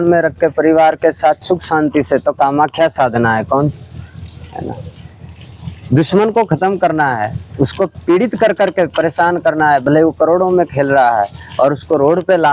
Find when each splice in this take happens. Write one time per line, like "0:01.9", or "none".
0:03.7